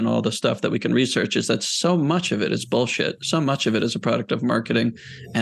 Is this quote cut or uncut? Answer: uncut